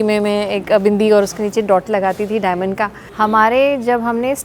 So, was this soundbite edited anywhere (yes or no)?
yes